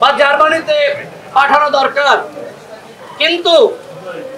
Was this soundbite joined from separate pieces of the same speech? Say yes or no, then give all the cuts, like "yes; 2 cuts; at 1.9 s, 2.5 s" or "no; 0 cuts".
no; 0 cuts